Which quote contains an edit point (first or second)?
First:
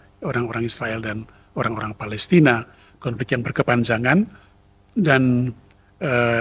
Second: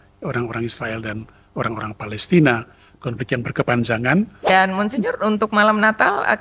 second